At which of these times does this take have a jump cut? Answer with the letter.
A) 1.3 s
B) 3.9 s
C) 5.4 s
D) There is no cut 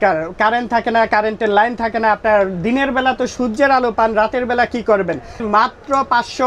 C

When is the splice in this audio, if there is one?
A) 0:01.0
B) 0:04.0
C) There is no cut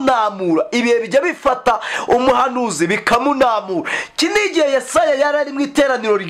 C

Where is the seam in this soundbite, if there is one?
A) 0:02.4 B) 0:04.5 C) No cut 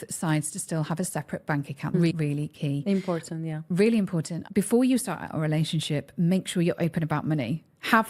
B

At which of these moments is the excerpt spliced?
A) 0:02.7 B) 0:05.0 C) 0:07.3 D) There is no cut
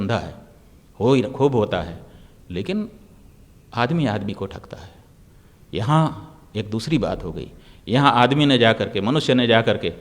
D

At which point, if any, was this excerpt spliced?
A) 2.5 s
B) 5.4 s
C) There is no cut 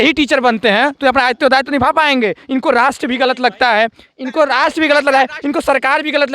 C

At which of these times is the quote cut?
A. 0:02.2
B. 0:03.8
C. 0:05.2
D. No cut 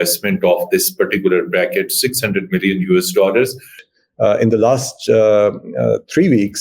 B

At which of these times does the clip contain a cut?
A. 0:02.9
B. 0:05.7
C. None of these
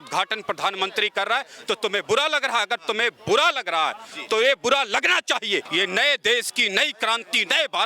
B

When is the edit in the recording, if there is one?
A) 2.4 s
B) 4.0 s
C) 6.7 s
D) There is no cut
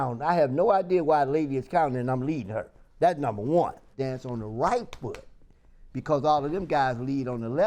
B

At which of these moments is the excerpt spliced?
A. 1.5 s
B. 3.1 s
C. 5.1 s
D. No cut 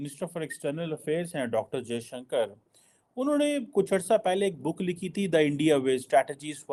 D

